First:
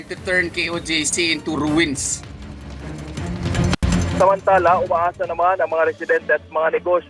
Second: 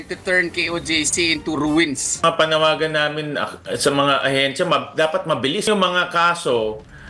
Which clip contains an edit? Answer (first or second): second